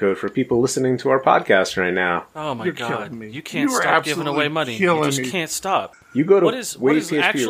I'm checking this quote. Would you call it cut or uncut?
cut